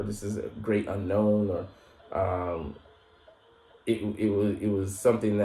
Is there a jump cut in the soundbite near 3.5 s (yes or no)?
no